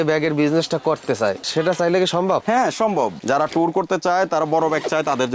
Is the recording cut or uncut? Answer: cut